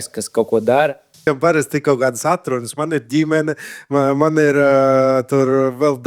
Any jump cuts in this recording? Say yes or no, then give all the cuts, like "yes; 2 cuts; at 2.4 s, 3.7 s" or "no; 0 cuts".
yes; 1 cut; at 1.3 s